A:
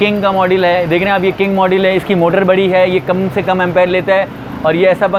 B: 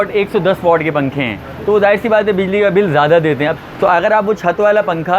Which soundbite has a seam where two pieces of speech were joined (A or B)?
B